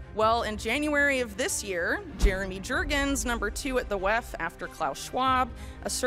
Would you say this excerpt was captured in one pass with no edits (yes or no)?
yes